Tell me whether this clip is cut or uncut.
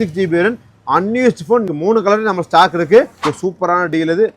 cut